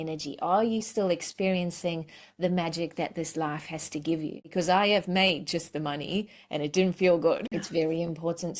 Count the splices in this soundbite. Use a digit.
2